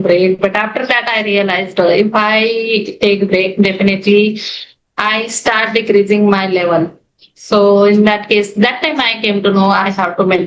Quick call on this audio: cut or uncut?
uncut